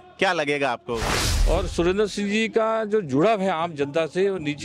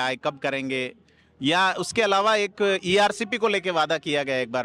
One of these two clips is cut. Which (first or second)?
first